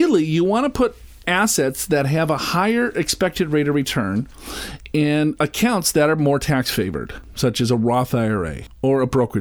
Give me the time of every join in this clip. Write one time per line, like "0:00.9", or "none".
none